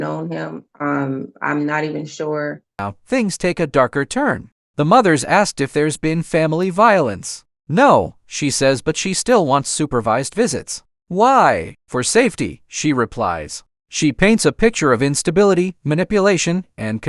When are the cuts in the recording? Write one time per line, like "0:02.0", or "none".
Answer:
none